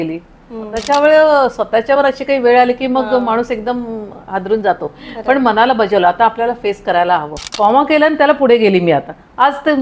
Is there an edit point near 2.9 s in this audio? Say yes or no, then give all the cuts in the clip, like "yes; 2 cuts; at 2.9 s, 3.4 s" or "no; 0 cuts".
no; 2 cuts; at 0.8 s, 7.4 s